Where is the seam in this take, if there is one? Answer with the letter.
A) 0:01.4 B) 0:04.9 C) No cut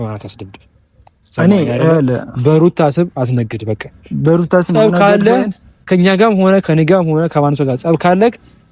C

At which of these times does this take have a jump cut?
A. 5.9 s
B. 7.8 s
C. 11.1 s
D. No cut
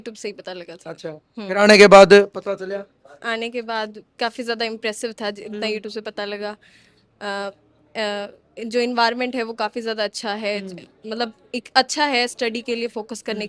D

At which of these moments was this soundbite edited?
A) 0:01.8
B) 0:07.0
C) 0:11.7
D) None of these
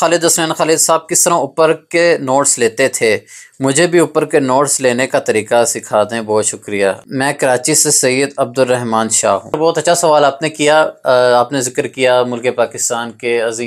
D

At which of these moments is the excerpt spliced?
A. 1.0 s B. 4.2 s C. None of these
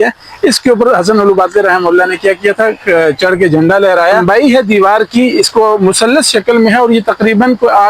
B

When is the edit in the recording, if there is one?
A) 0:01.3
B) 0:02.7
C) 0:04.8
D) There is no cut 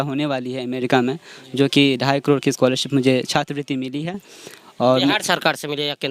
D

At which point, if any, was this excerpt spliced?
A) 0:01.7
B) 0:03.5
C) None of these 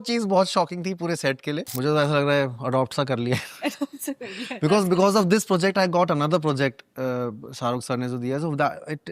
A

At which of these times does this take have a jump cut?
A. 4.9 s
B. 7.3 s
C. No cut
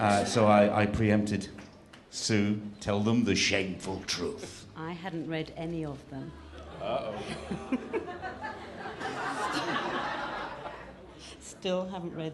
B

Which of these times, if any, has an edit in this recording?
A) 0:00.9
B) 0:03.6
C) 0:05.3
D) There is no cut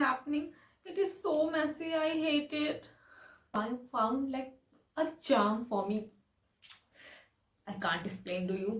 B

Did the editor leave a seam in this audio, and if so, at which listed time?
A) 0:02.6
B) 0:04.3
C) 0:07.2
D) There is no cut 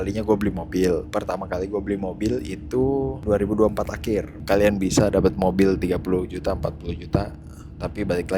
B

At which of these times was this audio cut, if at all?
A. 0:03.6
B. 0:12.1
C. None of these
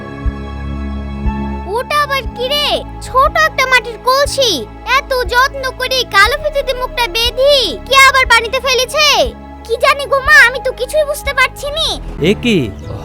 B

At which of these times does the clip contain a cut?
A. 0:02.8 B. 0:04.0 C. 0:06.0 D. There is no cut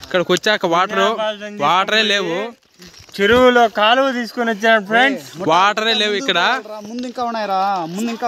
D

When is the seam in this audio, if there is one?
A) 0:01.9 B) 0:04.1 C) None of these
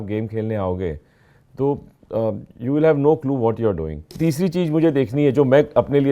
B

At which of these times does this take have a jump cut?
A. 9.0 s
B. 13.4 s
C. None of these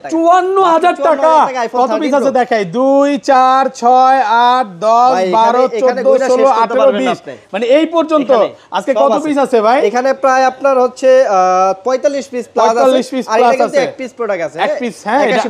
C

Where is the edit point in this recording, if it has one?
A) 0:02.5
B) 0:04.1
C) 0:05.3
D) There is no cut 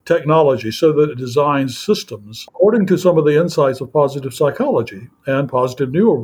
A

